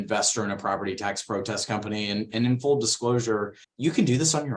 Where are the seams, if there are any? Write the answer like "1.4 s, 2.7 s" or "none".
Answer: 3.6 s